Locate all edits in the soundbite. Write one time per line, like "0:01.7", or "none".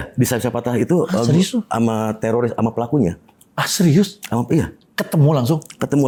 none